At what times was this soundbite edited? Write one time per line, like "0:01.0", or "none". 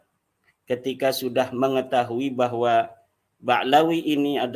none